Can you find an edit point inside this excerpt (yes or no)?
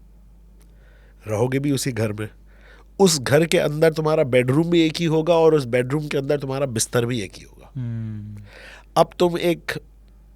no